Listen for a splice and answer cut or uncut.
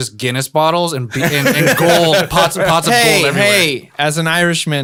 uncut